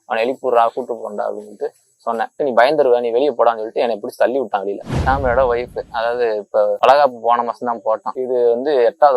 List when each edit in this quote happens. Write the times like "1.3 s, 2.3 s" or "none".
2.3 s, 4.8 s, 6.8 s, 8.1 s